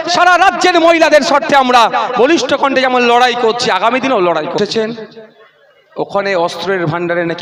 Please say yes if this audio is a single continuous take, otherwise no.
yes